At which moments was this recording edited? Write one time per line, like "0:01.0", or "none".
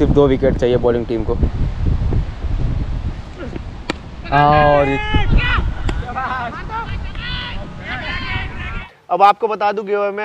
0:05.4
0:08.8